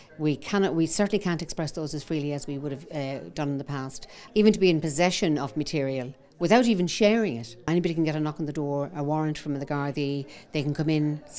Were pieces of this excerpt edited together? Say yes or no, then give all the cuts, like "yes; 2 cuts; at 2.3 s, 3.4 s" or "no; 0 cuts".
yes; 2 cuts; at 4.2 s, 7.7 s